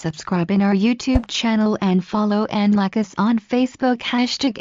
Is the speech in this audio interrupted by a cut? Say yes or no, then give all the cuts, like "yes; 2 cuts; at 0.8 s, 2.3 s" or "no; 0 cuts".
no; 0 cuts